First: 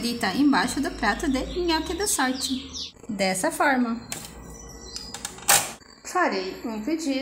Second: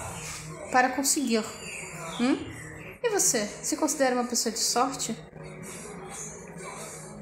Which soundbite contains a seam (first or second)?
first